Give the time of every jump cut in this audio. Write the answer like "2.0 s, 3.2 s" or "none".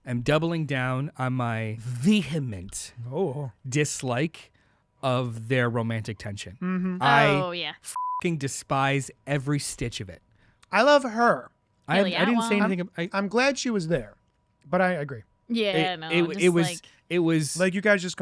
1.8 s

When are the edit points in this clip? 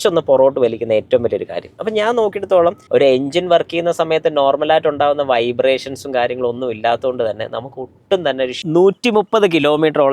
2.8 s, 8.6 s

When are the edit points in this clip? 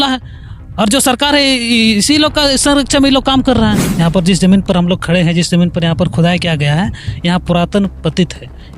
3.9 s

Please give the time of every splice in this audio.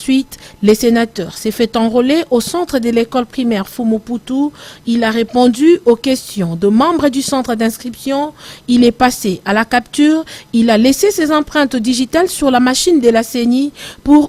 none

